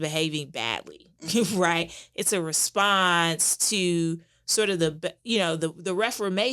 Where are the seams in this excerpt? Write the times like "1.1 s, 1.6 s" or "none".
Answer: none